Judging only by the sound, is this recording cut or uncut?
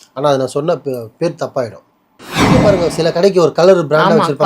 cut